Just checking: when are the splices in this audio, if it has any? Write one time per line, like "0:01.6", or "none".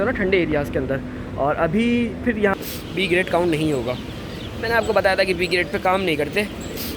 0:02.5

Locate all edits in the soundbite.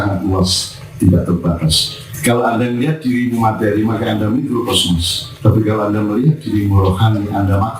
0:02.1

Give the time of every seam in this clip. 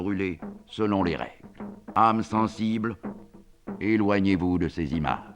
0:01.8

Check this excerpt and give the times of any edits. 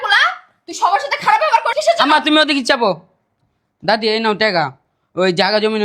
0:01.7

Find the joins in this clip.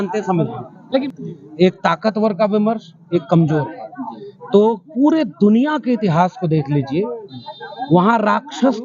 0:01.0

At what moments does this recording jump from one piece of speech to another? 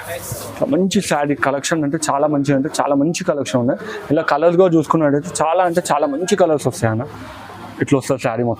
none

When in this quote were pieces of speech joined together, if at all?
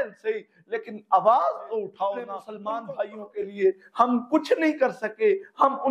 0:02.5

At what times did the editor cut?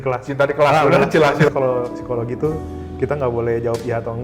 0:01.5

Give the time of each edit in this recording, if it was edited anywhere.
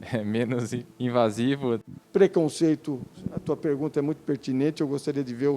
0:01.8

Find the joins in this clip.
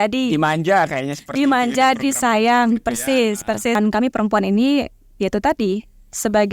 0:03.8

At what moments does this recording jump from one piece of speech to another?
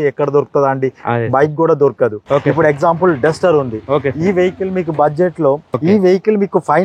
0:02.2
0:05.7

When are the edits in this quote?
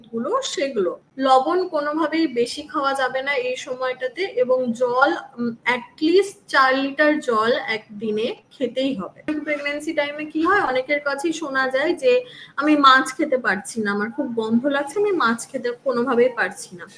0:01.0
0:09.3

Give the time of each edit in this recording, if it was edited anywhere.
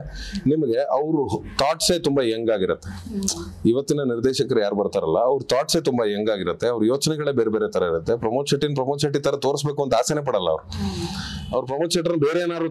none

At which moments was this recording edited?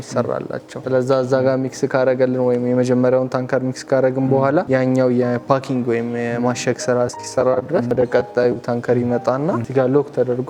0:07.9
0:09.6

